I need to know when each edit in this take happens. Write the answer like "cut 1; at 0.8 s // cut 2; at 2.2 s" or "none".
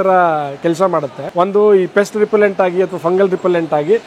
cut 1; at 1.2 s

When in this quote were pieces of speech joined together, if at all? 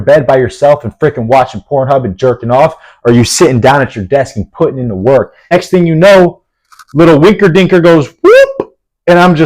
cut 1; at 5.5 s

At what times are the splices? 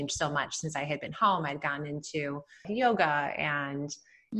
cut 1; at 2.6 s

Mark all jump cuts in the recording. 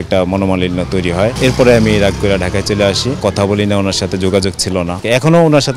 cut 1; at 1.4 s // cut 2; at 3.2 s // cut 3; at 5.0 s

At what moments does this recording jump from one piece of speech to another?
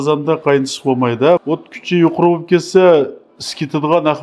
cut 1; at 1.4 s

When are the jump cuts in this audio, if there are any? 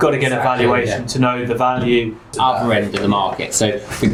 none

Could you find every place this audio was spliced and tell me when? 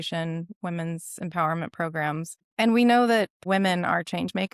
cut 1; at 2.4 s // cut 2; at 3.4 s

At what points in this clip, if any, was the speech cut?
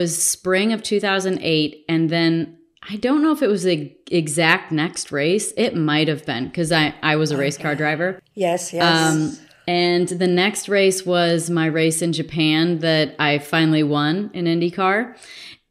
none

